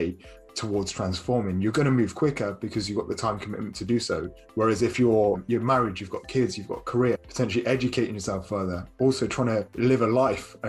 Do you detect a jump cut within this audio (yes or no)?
yes